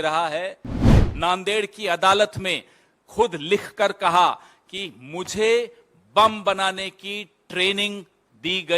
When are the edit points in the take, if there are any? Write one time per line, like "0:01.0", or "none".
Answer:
0:01.0